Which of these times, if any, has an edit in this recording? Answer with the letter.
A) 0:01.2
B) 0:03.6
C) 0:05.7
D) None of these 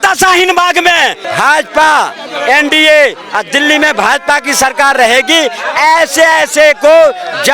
A